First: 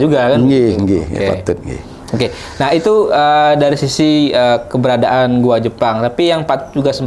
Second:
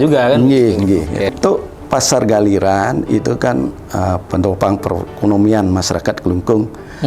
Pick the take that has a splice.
second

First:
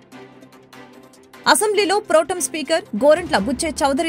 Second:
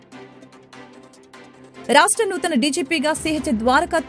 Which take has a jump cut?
first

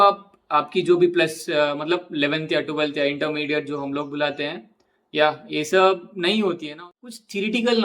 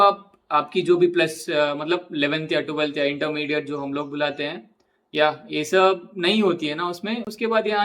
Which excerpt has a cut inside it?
first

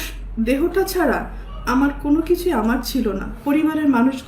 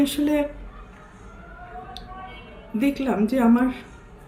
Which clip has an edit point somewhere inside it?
first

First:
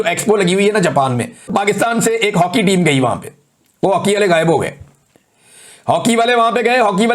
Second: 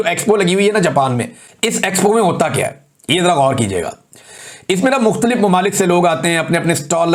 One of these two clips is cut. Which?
first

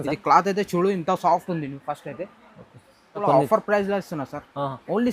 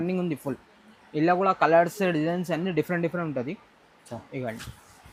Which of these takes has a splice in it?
first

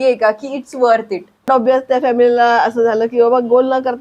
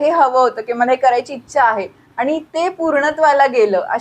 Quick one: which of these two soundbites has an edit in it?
first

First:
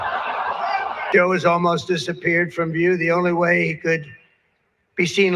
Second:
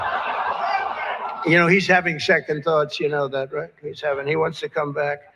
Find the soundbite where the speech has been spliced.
first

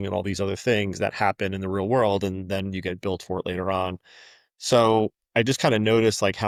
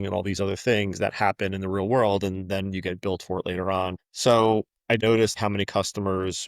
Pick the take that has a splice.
second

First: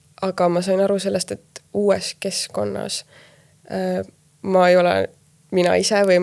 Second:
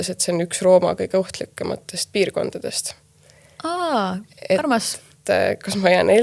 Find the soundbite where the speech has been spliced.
second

